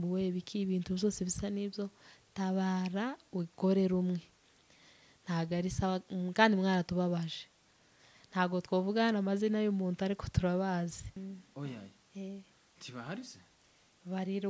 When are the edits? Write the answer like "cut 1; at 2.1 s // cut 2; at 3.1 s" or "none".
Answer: cut 1; at 11.2 s